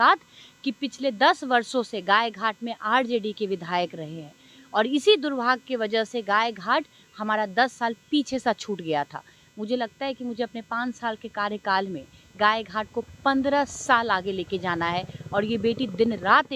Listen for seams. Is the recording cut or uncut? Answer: uncut